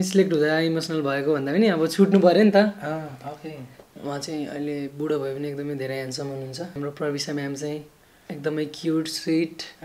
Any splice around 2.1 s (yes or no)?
no